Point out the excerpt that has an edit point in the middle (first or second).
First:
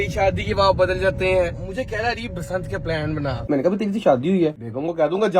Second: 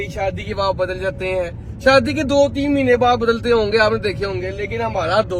first